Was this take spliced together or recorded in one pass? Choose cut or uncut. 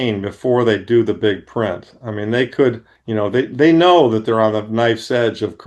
cut